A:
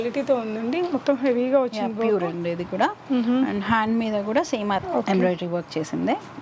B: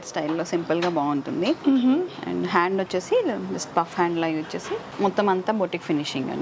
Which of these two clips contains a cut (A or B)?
A